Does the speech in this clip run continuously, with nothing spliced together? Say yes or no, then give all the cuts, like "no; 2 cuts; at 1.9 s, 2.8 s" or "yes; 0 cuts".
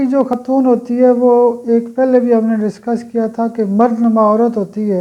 yes; 0 cuts